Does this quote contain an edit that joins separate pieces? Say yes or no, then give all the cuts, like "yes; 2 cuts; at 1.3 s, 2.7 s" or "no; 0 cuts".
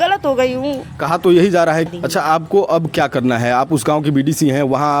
yes; 1 cut; at 1.9 s